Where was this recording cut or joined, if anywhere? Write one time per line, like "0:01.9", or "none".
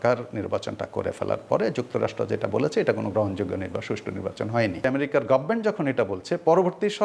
0:04.8